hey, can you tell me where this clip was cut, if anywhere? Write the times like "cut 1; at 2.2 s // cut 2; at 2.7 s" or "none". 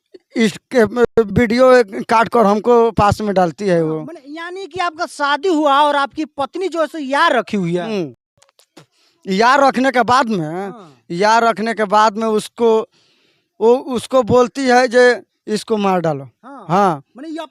none